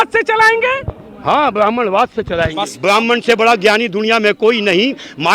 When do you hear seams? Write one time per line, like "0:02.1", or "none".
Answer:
0:02.7